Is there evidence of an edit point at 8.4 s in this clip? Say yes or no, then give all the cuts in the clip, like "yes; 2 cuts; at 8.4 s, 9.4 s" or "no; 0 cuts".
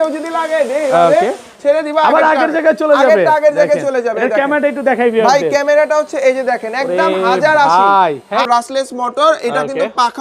yes; 1 cut; at 8.4 s